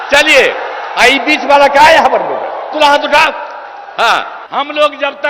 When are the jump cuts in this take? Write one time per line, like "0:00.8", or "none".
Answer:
0:04.4